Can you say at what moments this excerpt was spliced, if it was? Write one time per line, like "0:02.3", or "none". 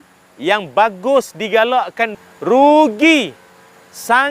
0:02.2